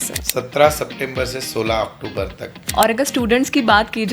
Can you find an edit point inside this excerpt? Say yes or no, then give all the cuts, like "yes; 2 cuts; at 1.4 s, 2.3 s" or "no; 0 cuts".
yes; 1 cut; at 2.6 s